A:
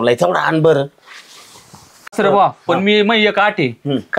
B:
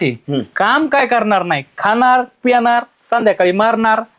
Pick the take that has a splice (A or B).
A